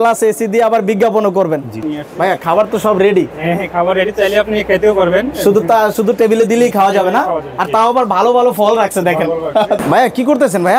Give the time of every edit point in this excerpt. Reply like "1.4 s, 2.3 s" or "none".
1.8 s, 9.8 s